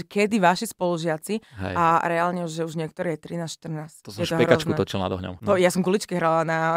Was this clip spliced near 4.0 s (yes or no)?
yes